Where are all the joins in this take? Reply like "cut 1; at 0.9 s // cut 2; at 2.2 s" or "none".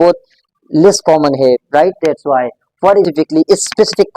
cut 1; at 3.0 s